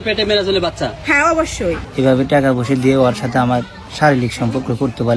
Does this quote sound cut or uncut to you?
cut